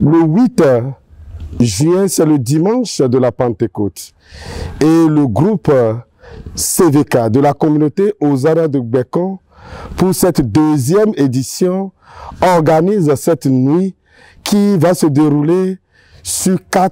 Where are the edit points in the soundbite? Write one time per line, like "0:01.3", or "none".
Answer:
none

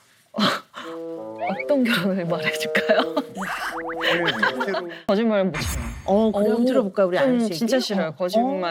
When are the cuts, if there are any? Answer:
0:05.1

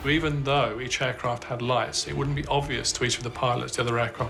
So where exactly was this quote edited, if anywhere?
none

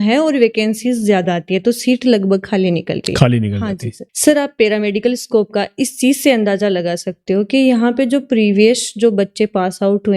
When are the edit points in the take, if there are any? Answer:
0:04.1

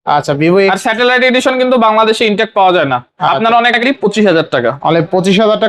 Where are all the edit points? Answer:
0:03.8

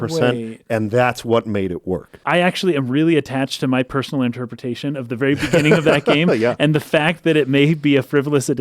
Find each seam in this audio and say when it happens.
0:02.1

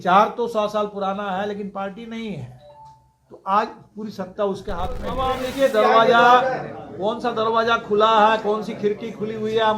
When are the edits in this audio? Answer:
0:05.3

